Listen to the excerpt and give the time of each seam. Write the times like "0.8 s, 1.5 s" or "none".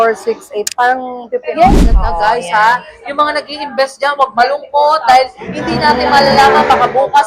1.8 s